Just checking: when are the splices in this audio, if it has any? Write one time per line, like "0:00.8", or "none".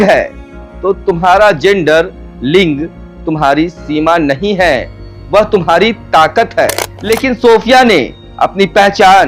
0:06.9